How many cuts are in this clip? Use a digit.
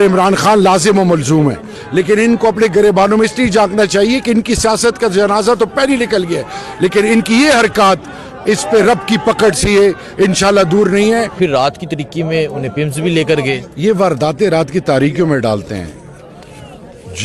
2